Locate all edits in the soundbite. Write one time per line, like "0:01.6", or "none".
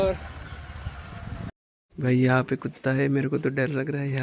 0:01.5